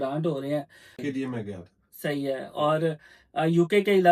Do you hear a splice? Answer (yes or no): yes